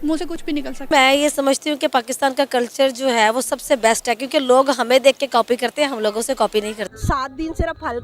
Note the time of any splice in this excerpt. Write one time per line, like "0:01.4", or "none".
0:06.9